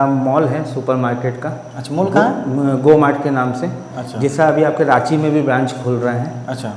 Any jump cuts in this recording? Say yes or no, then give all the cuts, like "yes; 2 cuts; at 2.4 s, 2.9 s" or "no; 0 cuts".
no; 0 cuts